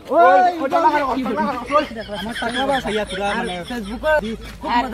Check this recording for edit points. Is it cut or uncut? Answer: cut